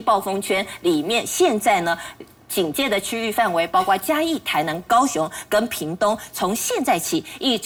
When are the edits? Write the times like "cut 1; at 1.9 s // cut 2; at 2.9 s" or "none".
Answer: none